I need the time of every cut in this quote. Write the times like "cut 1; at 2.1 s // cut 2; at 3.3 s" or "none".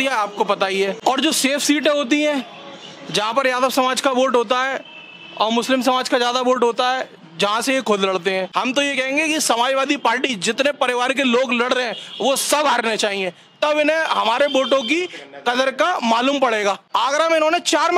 cut 1; at 1.0 s // cut 2; at 8.5 s // cut 3; at 16.8 s